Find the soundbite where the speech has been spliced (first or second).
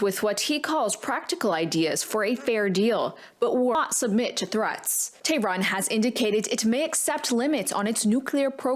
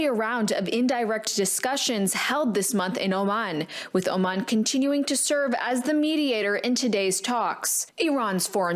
first